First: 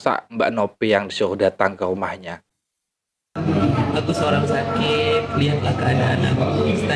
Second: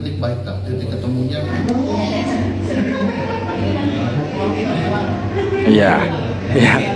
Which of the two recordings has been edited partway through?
second; 1 cut; at 1.5 s

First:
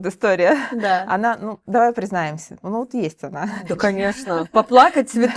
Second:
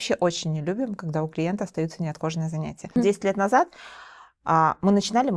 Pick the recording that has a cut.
second; 1 cut; at 2.8 s

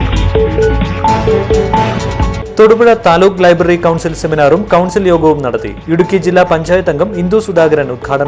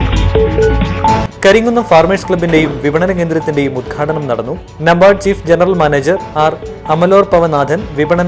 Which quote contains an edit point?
second; 1 cut; at 1.2 s

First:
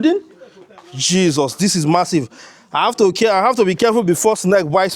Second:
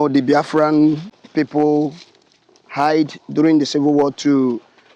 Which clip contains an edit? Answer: second; 1 cut; at 1.1 s

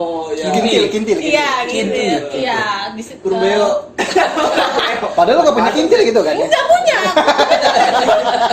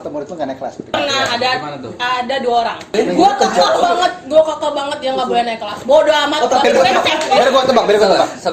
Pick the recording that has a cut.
second; 3 cuts; at 0.9 s, 2.8 s, 6.6 s

